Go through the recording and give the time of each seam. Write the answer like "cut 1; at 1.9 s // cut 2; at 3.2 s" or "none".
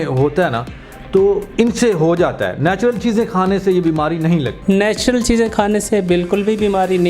cut 1; at 4.5 s